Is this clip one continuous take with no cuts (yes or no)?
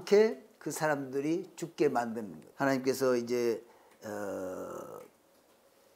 no